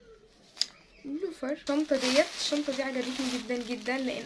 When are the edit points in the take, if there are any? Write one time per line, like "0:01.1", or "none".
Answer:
0:01.6